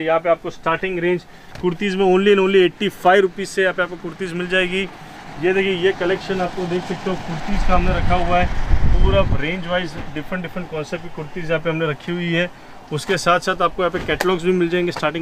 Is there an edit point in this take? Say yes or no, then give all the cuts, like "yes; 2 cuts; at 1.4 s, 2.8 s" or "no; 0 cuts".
no; 0 cuts